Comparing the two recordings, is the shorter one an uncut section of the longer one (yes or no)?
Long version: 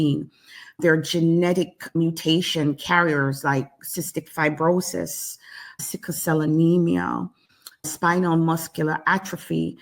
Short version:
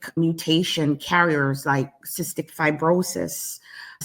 yes